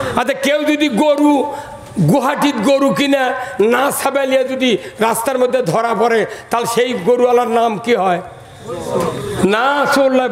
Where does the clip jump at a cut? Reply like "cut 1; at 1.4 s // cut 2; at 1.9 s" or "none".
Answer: none